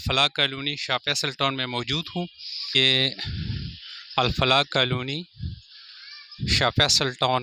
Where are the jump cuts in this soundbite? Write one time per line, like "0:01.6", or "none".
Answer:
0:02.8